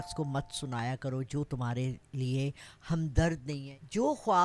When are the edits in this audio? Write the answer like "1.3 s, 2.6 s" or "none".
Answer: 3.5 s

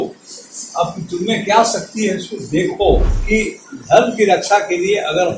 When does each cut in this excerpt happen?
3.1 s

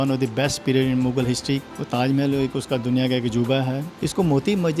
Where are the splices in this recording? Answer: 1.6 s, 3.9 s

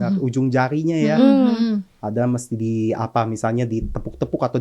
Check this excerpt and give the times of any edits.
none

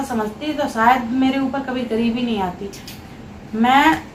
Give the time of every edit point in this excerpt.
none

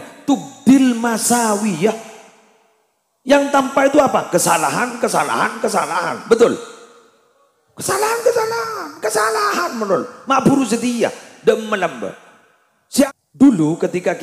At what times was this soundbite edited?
13.1 s

